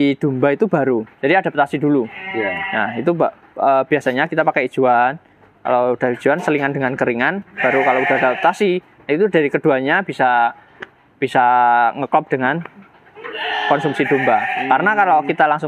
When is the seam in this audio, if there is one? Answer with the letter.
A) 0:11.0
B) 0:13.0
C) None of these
C